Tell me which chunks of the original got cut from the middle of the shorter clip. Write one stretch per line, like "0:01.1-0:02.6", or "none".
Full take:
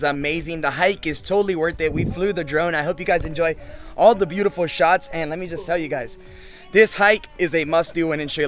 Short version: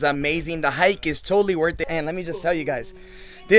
0:01.8-0:05.0